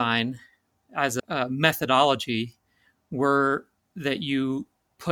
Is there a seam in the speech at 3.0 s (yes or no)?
no